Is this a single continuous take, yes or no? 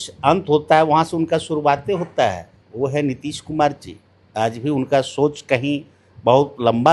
yes